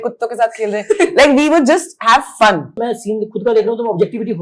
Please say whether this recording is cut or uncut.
cut